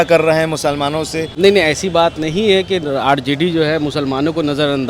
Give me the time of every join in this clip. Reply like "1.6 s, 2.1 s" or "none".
1.3 s